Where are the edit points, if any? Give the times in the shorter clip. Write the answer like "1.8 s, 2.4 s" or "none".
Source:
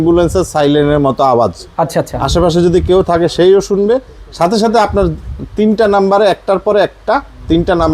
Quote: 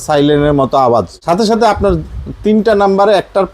1.1 s